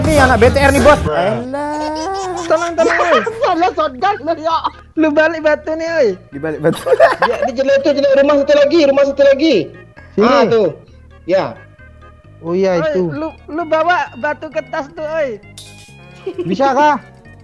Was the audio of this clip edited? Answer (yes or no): yes